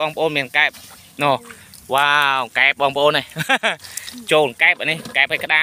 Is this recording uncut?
yes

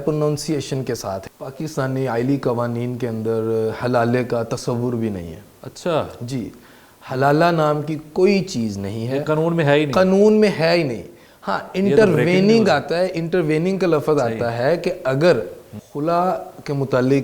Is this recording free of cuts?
no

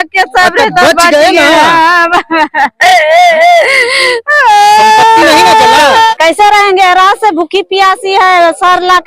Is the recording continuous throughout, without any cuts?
no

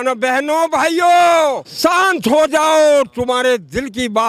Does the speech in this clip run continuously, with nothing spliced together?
no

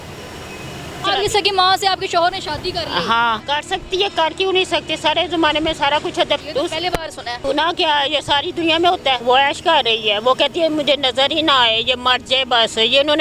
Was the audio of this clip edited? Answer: yes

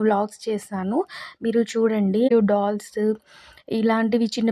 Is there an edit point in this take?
yes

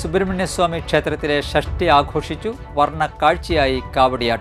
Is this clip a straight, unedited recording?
yes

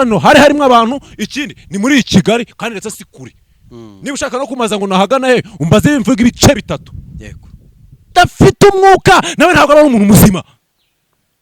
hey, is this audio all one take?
no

